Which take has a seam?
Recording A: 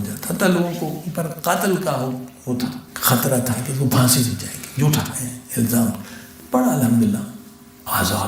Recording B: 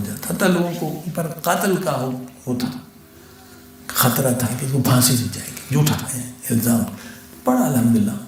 A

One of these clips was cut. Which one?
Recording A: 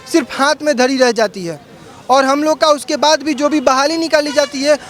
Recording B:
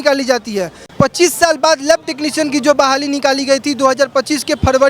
B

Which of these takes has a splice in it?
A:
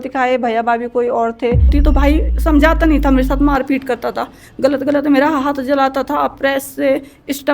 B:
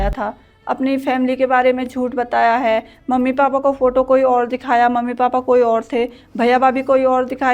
A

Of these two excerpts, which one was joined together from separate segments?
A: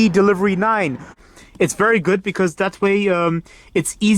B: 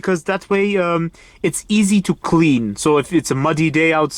A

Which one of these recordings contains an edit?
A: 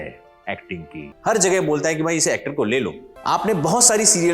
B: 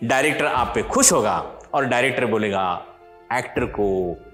A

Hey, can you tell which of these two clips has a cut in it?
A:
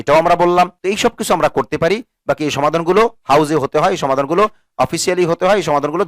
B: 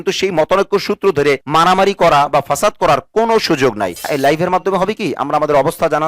B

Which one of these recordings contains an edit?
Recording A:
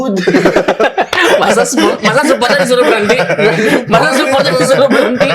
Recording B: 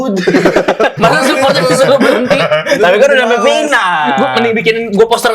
B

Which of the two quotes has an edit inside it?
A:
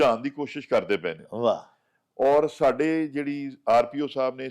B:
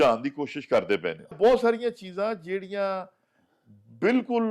B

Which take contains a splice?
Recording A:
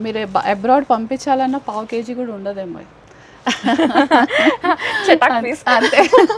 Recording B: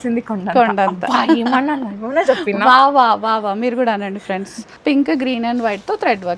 B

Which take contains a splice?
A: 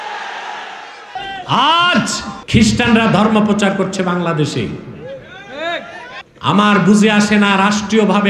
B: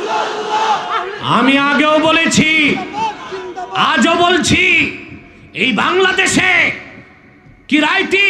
A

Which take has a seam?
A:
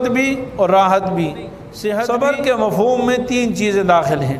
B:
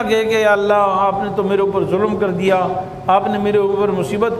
A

